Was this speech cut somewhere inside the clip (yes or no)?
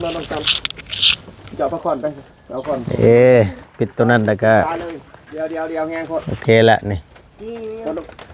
yes